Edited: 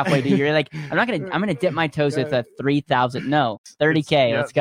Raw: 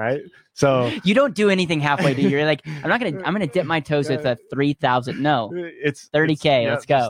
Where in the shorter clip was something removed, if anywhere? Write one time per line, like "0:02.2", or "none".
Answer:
0:03.7